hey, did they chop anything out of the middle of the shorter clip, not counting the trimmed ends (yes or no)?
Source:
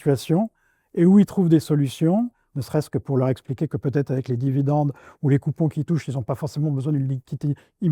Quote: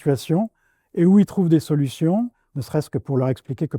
no